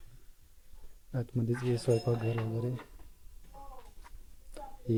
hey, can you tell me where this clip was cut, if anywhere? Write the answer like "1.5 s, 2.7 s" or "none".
none